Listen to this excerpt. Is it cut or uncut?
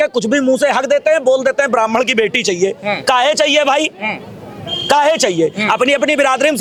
uncut